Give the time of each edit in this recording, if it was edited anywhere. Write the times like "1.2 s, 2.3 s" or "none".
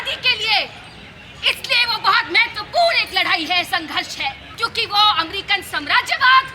4.5 s